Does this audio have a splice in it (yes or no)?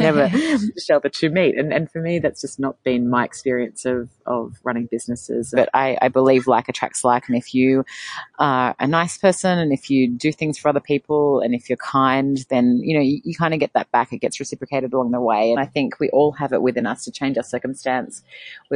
yes